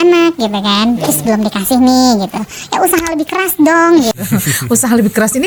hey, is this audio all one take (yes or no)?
yes